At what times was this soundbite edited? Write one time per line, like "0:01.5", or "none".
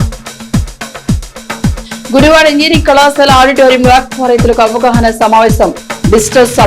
0:02.0